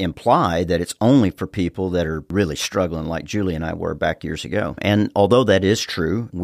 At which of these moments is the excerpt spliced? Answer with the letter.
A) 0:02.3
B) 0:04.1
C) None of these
A